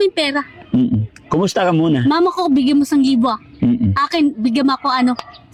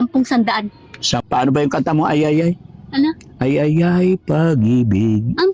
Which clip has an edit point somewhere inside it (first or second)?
second